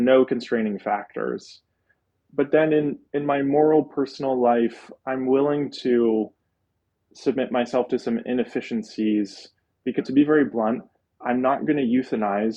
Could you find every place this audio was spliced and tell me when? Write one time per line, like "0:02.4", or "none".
0:10.0